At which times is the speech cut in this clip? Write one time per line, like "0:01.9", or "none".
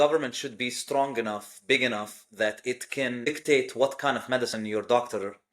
0:03.3